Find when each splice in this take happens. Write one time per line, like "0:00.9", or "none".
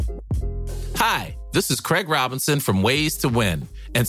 0:01.0

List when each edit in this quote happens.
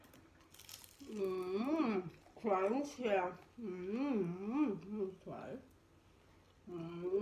none

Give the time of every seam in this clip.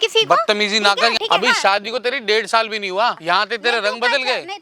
0:01.2
0:03.2

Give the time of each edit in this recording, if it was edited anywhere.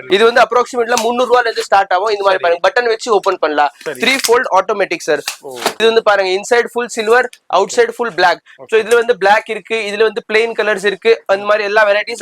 0:05.8

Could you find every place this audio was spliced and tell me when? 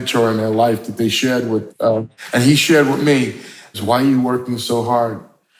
0:02.2
0:03.7

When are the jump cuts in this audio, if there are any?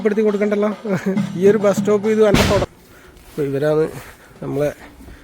0:02.6

